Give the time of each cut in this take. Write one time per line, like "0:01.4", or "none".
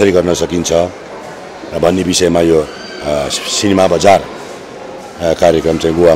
none